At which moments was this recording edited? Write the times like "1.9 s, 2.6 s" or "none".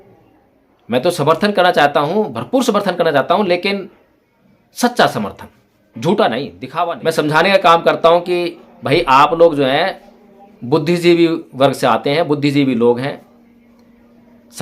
6.6 s

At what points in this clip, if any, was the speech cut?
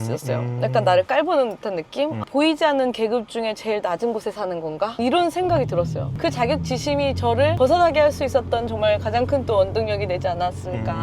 2.2 s

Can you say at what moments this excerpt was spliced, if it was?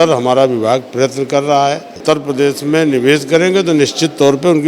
2.0 s

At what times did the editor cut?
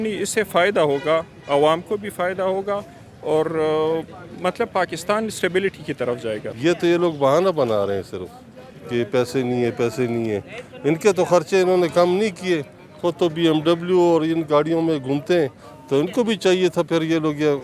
none

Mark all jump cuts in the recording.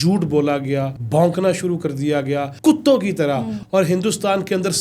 1.0 s, 2.5 s, 3.6 s

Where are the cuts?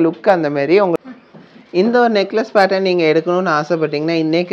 1.3 s

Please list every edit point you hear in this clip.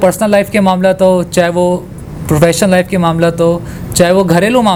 none

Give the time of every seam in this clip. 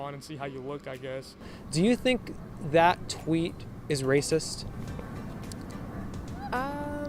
1.6 s

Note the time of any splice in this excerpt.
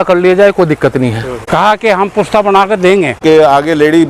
1.3 s, 3.2 s

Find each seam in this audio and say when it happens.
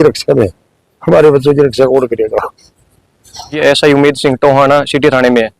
3.6 s

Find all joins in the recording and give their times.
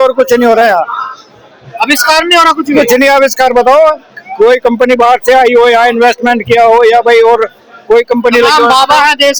none

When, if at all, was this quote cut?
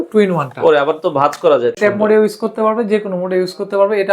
1.7 s

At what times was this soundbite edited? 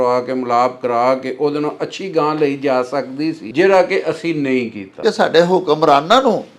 3.4 s, 5.0 s

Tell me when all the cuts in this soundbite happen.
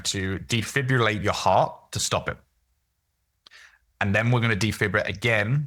none

